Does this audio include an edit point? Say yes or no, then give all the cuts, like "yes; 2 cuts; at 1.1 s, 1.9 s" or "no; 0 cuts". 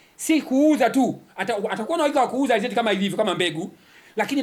no; 0 cuts